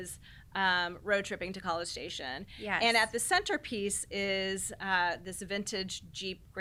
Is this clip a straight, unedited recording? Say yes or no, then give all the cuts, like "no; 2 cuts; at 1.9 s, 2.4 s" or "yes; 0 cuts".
yes; 0 cuts